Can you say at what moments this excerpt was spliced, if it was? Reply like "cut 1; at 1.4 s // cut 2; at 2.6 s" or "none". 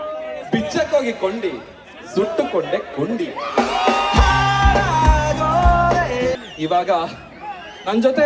cut 1; at 6.4 s

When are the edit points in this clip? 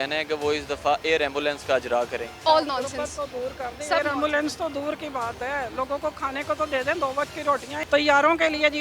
cut 1; at 2.3 s // cut 2; at 7.7 s

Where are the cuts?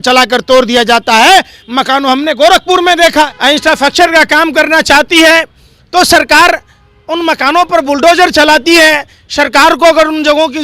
cut 1; at 3.3 s

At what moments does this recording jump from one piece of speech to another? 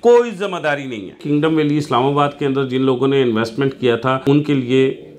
cut 1; at 1.2 s // cut 2; at 4.2 s

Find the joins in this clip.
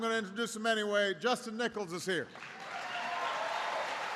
cut 1; at 1.1 s

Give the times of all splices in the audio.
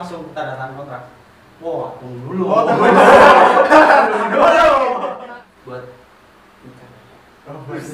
cut 1; at 5.0 s

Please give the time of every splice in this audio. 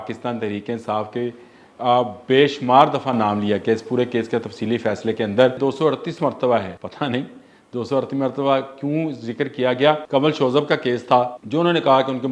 cut 1; at 5.6 s // cut 2; at 6.8 s // cut 3; at 10.0 s // cut 4; at 11.4 s

